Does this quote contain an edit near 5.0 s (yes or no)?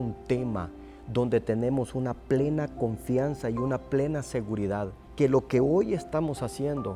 yes